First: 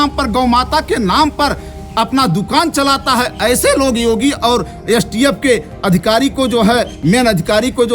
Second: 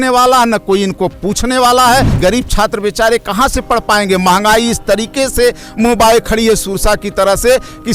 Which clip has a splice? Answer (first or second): second